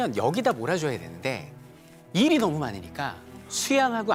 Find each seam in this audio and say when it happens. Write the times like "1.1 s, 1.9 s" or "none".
none